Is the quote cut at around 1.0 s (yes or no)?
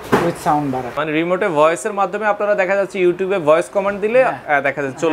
yes